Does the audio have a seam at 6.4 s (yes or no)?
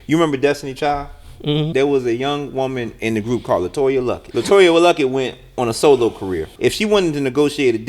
yes